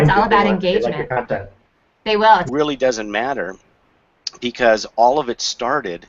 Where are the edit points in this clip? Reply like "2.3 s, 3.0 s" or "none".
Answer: none